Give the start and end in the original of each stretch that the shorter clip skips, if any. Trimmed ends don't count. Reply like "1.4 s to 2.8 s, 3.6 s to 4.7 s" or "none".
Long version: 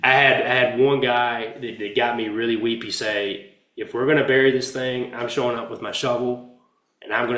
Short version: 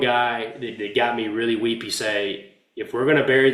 none